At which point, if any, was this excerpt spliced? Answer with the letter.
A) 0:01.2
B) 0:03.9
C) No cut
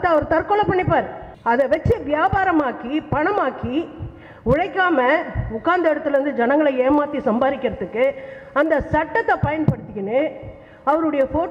A